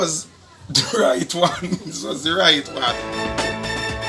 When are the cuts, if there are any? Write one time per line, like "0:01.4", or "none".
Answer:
0:03.0